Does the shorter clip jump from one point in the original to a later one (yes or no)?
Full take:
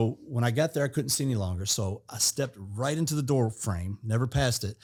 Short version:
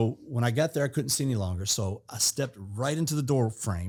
no